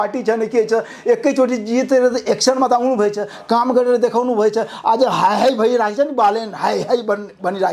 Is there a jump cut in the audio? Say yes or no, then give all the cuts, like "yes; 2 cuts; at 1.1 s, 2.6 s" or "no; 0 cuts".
no; 0 cuts